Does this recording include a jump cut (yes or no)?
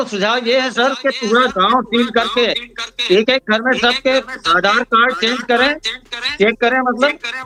no